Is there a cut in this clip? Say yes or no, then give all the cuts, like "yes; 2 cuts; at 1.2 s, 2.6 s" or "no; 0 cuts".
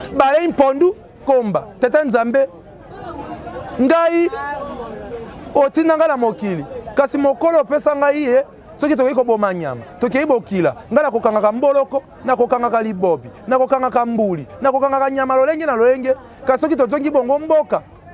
yes; 1 cut; at 1.2 s